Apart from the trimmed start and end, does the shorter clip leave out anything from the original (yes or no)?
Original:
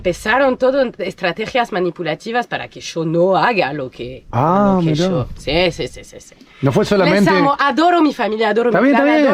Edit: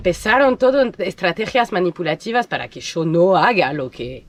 no